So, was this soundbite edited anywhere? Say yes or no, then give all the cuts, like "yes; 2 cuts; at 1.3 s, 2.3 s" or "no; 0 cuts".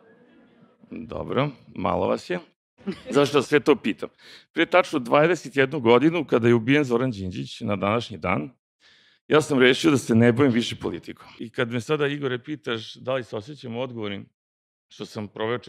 yes; 1 cut; at 11.4 s